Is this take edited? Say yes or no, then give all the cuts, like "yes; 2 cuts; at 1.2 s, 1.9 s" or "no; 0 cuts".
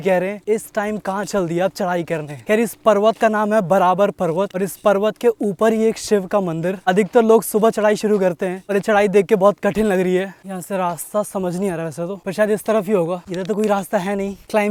no; 0 cuts